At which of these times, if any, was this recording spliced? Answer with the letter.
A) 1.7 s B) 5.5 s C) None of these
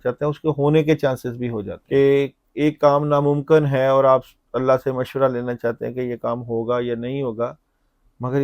A